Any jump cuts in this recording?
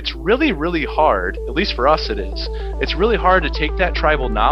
no; 0 cuts

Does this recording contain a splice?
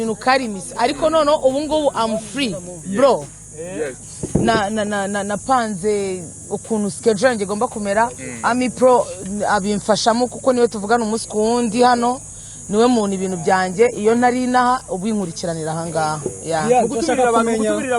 yes; 1 cut; at 4.0 s

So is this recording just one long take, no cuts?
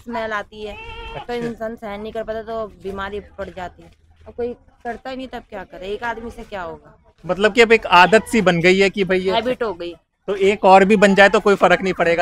yes; 0 cuts

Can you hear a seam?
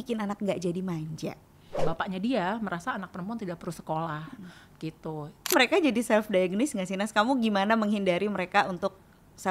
yes; 2 cuts; at 1.8 s, 5.5 s

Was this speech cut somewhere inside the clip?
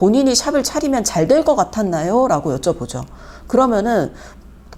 no; 0 cuts

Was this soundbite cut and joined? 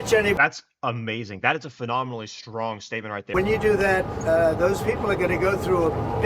yes; 1 cut; at 3.3 s

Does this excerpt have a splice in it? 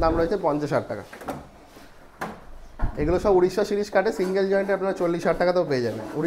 no; 0 cuts

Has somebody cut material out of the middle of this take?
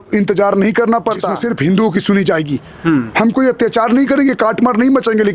yes; 1 cut; at 1.4 s

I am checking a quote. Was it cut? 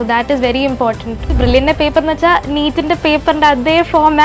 yes; 1 cut; at 1.4 s

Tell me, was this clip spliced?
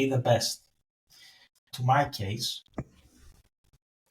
yes; 1 cut; at 1.7 s

